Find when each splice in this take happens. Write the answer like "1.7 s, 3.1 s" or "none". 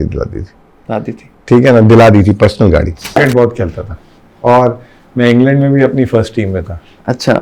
3.2 s